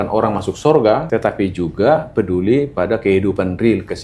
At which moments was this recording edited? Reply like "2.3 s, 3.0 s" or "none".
1.0 s